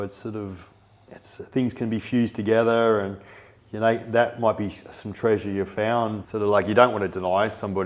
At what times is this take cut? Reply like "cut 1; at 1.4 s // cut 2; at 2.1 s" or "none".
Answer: cut 1; at 6.2 s